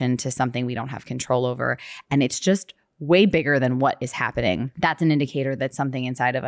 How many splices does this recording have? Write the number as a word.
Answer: one